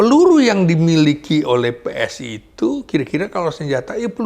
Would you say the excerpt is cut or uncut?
uncut